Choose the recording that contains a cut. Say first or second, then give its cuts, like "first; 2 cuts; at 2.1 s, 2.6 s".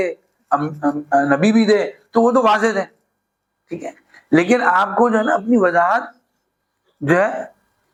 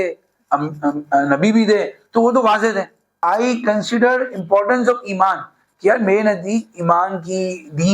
second; 1 cut; at 3.2 s